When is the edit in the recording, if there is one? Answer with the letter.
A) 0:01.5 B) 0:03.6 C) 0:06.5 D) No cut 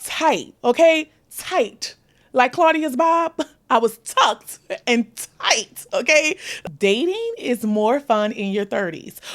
C